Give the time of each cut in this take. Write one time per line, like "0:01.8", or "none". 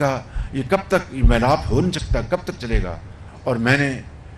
0:03.0